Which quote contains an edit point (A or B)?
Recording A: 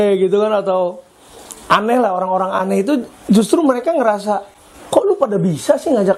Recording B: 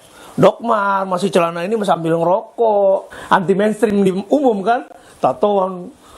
B